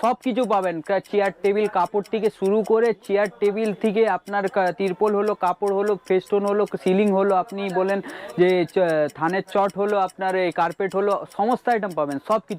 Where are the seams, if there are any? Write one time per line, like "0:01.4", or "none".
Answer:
none

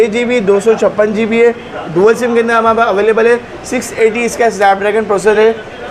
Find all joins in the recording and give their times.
none

